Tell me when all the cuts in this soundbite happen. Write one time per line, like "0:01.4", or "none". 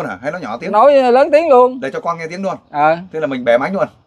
none